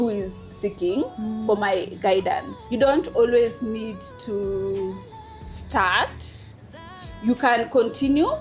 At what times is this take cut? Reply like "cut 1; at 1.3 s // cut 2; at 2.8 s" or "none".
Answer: cut 1; at 2.6 s